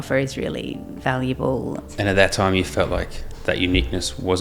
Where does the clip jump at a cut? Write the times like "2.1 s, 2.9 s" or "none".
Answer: 0.9 s, 1.9 s

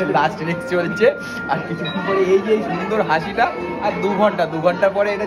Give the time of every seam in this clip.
none

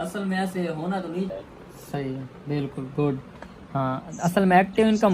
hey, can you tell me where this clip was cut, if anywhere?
1.3 s

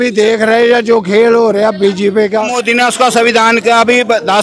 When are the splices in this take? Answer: 2.6 s

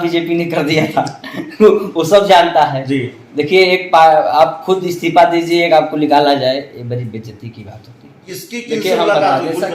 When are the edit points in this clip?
8.3 s

